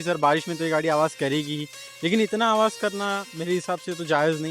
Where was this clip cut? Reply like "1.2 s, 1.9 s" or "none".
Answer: none